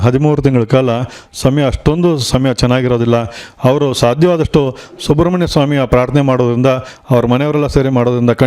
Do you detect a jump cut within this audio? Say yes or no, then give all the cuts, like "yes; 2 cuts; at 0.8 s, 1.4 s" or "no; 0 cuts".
no; 0 cuts